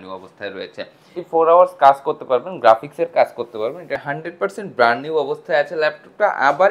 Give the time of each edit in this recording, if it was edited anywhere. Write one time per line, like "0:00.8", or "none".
0:01.1
0:04.0